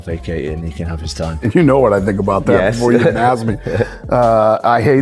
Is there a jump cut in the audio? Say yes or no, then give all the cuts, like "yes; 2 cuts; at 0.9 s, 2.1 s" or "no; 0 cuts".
no; 0 cuts